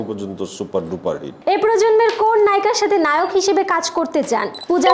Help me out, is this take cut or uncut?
cut